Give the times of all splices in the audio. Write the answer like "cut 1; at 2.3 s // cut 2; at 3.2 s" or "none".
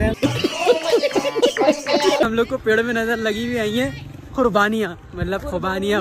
cut 1; at 2.3 s